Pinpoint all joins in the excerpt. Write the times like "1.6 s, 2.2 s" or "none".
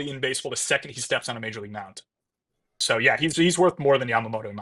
2.8 s